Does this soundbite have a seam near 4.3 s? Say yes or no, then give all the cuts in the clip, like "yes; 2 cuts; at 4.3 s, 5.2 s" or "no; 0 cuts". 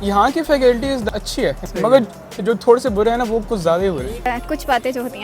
yes; 2 cuts; at 1.1 s, 4.3 s